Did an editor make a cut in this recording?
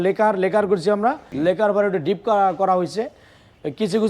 yes; 1 cut; at 1.3 s

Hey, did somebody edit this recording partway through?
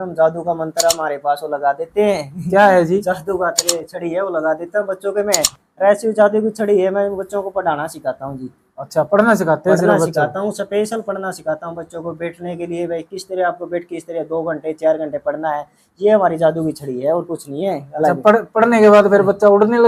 no; 0 cuts

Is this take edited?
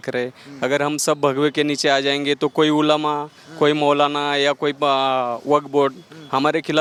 no; 0 cuts

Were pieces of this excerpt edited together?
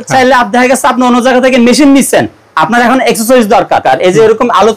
yes; 1 cut; at 3.8 s

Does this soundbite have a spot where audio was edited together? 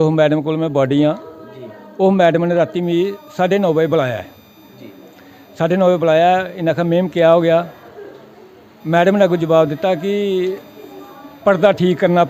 no; 0 cuts

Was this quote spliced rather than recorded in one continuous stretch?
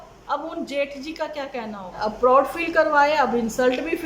yes; 1 cut; at 2.0 s

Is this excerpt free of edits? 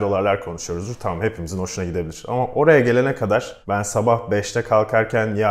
no; 1 cut; at 3.6 s

